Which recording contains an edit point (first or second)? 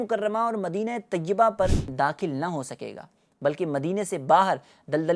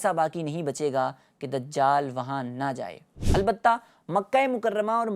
first